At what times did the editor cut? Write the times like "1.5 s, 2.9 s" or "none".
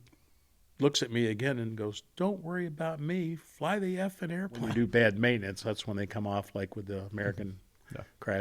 4.6 s